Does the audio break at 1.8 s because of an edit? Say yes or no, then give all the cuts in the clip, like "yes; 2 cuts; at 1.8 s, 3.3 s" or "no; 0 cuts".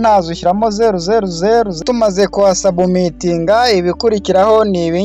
yes; 1 cut; at 1.8 s